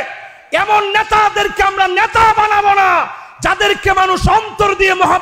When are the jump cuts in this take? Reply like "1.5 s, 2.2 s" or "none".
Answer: none